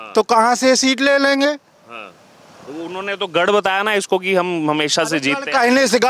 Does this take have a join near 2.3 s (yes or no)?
no